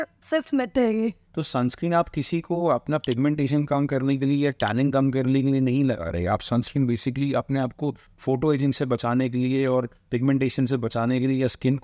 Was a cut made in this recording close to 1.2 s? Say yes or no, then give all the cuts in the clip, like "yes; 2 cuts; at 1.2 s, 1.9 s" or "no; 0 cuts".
yes; 1 cut; at 1.2 s